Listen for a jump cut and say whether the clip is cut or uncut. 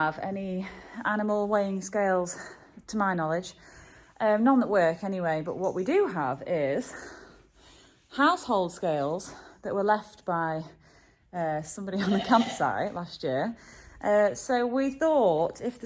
uncut